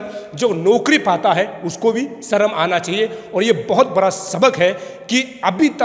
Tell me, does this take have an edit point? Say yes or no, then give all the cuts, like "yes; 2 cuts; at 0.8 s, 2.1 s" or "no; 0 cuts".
no; 0 cuts